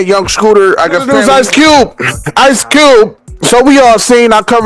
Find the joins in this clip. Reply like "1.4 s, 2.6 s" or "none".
1.1 s